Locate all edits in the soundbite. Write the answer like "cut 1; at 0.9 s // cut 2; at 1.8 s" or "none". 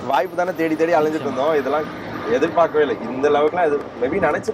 none